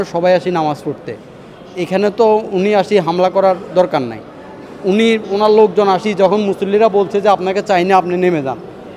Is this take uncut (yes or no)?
yes